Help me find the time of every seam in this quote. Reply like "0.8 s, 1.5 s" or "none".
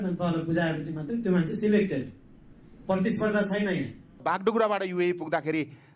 4.0 s